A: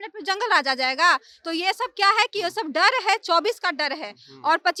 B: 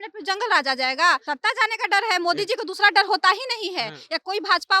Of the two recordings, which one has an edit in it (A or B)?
B